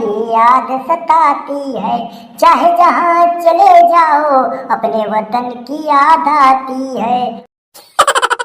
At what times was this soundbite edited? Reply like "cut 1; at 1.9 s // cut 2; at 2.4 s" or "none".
cut 1; at 7.4 s